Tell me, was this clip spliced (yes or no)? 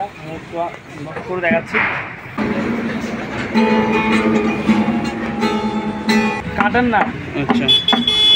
yes